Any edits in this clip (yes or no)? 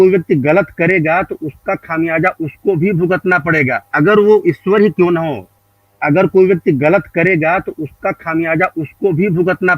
no